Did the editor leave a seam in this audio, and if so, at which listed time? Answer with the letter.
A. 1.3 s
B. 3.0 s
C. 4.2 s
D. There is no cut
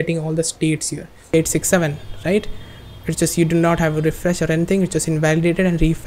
A